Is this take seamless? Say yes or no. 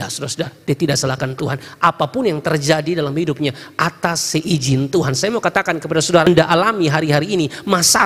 no